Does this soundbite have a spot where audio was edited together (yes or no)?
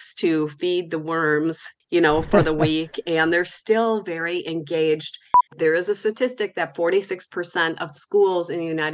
yes